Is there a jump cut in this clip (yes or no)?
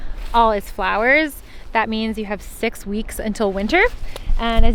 no